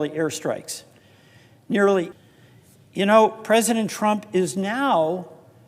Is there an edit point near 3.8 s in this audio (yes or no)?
no